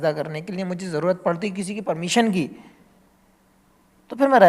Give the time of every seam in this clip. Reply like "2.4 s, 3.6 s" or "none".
none

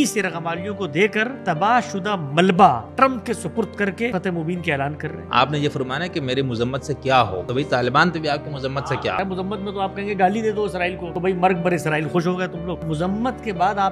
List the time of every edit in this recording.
1.4 s, 2.9 s, 4.1 s, 5.2 s, 7.4 s, 8.8 s, 11.1 s, 12.8 s

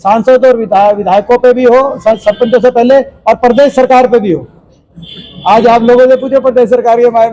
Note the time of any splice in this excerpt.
none

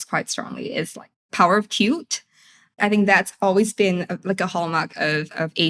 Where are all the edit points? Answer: 1.2 s, 2.8 s

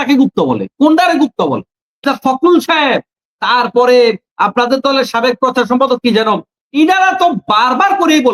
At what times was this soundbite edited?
2.0 s

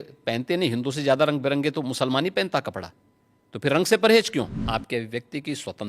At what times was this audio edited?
4.6 s

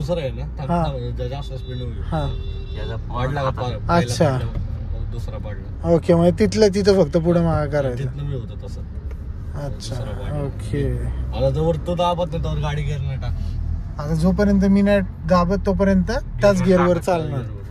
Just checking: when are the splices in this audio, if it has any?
none

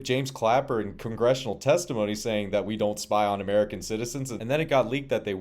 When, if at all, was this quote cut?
4.3 s

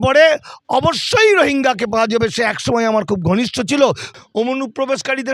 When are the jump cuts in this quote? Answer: 4.1 s

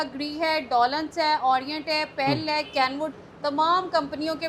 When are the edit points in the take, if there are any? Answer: none

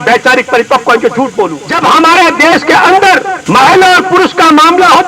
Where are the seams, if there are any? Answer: 1.6 s, 3.4 s

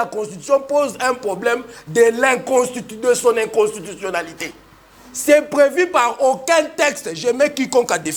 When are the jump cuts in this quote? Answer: none

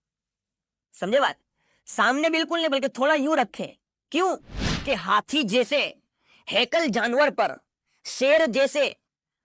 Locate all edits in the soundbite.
4.6 s

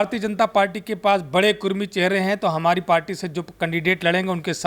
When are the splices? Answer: none

